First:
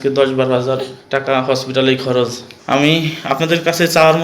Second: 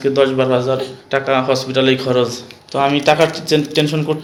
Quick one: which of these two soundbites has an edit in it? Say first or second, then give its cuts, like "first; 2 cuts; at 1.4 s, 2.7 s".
first; 1 cut; at 2.5 s